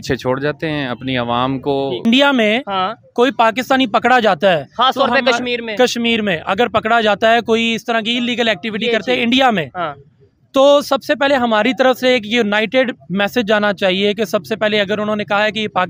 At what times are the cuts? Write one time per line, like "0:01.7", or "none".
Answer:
0:02.0